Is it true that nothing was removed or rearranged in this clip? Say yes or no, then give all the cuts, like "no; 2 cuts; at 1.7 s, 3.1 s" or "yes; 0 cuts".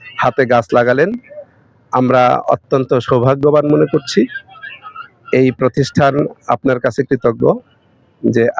yes; 0 cuts